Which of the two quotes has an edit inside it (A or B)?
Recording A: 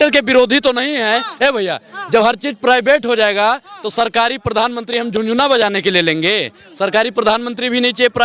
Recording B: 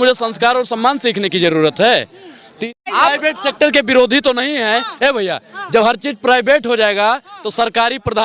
B